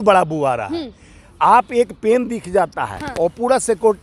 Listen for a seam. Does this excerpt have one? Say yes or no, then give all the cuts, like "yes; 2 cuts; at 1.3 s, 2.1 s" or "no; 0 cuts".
no; 0 cuts